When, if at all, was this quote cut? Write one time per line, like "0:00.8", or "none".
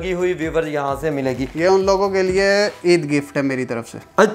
0:01.5